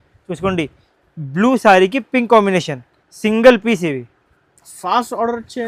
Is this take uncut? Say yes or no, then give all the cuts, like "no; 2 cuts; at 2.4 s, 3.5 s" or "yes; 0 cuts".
yes; 0 cuts